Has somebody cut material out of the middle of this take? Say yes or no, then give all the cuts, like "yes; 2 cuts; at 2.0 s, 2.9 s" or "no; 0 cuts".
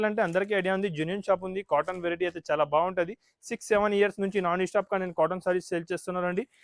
no; 0 cuts